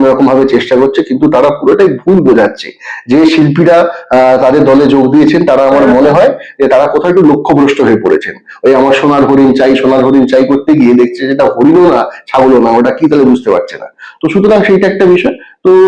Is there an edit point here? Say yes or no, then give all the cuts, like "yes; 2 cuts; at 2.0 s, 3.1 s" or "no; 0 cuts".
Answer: no; 0 cuts